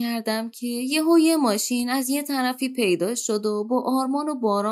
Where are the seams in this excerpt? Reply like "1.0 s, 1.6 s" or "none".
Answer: none